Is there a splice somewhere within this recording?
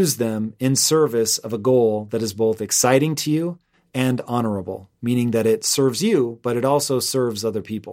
no; 0 cuts

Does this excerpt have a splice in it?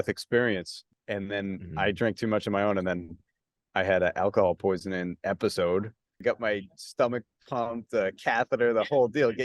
yes; 2 cuts; at 1.0 s, 6.2 s

